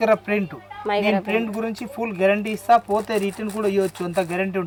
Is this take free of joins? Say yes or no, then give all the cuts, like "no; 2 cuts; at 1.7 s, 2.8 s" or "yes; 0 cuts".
yes; 0 cuts